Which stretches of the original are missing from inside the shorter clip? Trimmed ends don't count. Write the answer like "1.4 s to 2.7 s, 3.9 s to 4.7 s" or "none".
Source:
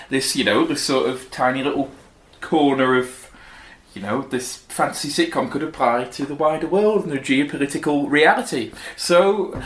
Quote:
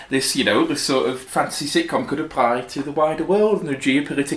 1.2 s to 4.7 s